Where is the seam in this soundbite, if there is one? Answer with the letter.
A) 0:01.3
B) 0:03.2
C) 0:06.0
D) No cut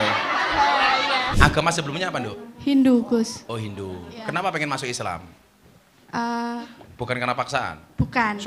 A